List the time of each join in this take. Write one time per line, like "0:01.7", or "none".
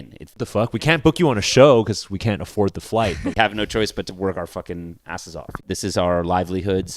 0:03.3
0:05.6